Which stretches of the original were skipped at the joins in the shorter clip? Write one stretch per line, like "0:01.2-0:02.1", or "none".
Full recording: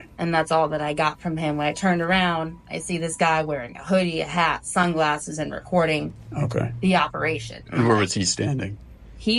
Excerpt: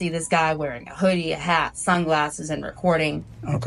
none